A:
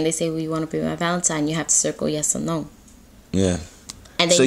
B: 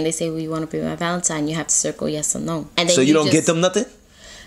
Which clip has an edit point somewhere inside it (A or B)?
B